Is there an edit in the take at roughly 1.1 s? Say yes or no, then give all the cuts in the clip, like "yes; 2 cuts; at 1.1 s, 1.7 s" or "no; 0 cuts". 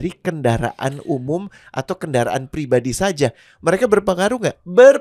no; 0 cuts